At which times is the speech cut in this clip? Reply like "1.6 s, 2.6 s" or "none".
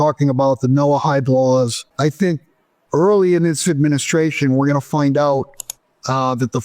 1.8 s